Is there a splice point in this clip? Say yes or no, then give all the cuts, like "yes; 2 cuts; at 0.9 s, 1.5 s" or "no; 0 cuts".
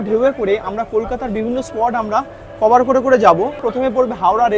yes; 1 cut; at 3.6 s